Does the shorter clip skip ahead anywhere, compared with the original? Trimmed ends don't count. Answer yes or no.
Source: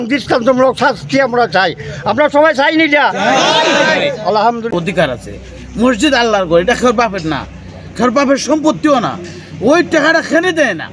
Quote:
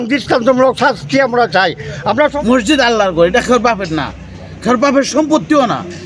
yes